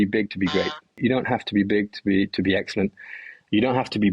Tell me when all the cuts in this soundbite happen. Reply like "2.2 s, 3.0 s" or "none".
1.0 s